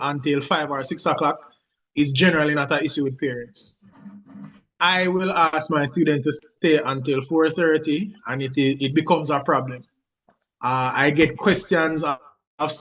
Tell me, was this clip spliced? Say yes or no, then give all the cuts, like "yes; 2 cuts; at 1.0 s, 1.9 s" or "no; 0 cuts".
no; 0 cuts